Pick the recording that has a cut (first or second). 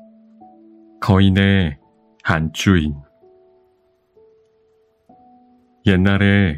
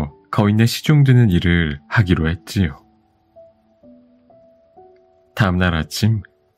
first